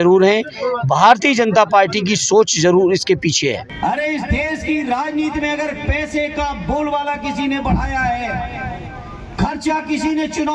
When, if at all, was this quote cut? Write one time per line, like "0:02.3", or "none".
0:03.7